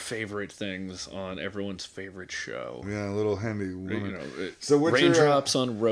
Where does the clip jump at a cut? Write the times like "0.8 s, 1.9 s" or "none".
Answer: none